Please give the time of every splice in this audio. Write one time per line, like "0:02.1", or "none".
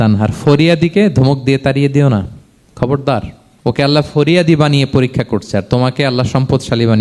0:03.4